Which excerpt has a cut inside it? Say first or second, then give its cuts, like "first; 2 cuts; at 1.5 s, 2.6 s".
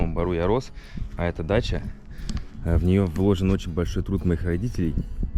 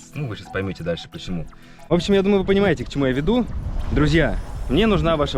second; 1 cut; at 1.8 s